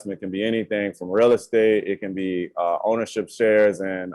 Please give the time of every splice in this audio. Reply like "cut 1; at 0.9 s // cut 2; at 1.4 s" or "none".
none